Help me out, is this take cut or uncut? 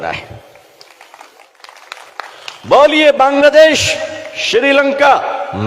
cut